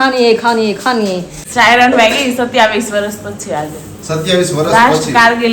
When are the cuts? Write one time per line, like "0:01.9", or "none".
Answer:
0:01.4